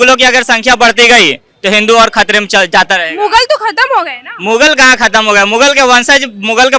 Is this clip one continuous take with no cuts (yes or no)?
yes